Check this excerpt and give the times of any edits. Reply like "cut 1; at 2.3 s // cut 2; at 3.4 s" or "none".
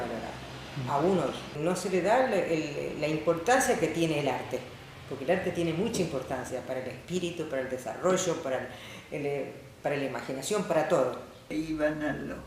cut 1; at 1.5 s // cut 2; at 11.5 s